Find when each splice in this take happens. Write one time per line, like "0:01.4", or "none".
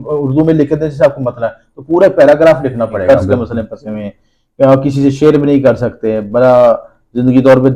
0:03.0